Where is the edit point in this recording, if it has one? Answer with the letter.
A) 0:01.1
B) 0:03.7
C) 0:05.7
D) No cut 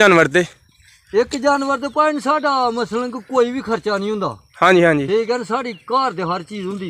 D